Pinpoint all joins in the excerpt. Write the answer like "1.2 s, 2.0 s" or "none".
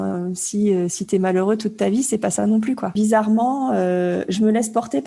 2.9 s